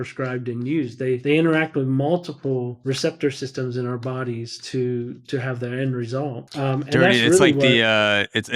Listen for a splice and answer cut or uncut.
cut